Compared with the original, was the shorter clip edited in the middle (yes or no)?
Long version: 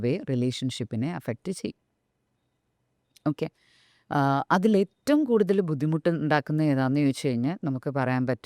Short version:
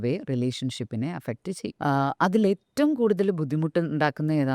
yes